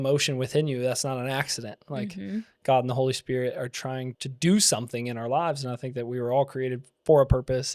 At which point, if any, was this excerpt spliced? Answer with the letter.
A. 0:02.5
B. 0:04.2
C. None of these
B